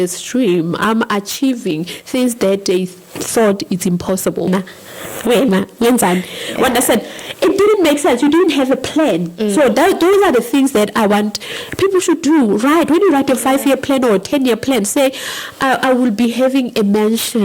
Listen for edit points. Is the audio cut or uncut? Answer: cut